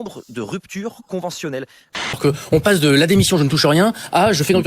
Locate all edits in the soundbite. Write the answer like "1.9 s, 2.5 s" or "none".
2.2 s